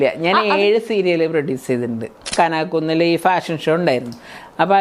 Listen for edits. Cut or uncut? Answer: cut